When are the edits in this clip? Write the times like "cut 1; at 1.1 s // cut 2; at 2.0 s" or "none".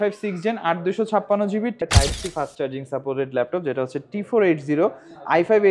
cut 1; at 1.8 s